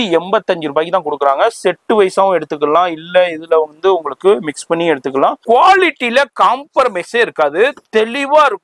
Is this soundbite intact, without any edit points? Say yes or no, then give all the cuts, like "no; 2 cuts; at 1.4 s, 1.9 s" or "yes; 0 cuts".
no; 1 cut; at 5.4 s